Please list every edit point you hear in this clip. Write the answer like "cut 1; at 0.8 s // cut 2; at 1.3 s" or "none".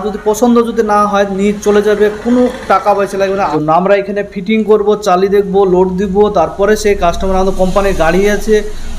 cut 1; at 3.5 s